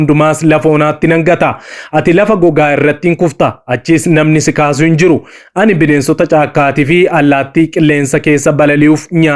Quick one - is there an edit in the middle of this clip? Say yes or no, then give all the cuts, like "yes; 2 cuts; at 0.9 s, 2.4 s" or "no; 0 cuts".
no; 0 cuts